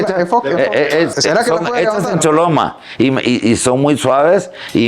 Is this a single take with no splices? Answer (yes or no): no